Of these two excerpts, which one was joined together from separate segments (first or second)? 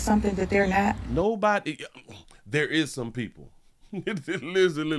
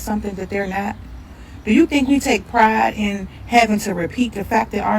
second